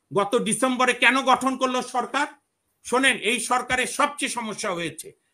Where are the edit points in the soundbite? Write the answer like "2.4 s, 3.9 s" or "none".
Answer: none